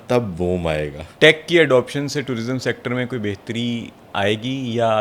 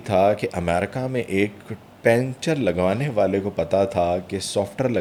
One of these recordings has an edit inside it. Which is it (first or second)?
first